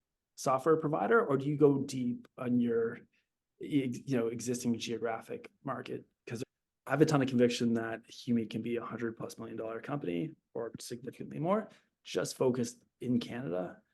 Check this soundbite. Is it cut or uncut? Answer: cut